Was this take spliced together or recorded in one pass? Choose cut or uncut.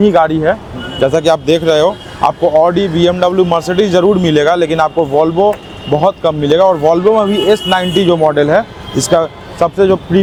uncut